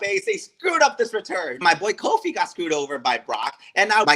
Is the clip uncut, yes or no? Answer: no